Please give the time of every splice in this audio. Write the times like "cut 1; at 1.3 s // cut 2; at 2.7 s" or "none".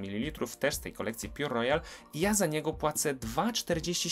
none